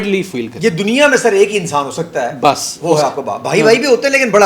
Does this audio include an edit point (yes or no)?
no